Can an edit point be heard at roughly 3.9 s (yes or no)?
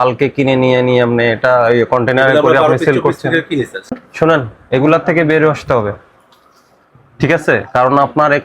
yes